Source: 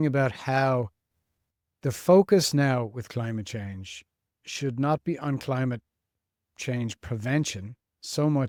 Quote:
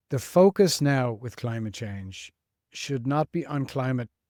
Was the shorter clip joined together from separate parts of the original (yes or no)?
no